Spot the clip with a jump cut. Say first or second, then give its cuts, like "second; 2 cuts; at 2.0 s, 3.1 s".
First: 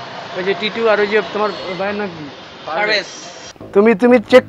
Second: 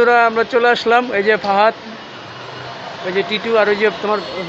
first; 1 cut; at 3.3 s